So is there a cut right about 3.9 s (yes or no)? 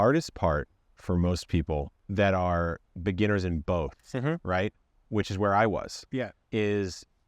no